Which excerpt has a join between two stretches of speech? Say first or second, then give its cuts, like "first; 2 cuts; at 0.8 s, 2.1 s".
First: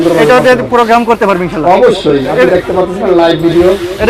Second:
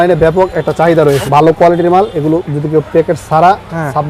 second; 1 cut; at 1.2 s